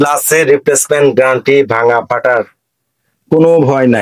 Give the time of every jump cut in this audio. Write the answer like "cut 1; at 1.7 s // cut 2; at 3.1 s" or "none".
none